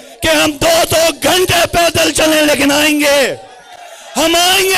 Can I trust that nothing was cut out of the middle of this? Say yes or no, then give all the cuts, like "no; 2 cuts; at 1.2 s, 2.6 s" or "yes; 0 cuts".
yes; 0 cuts